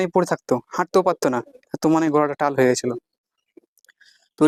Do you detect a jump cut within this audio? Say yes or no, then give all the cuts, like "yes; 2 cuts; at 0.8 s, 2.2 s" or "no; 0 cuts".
no; 0 cuts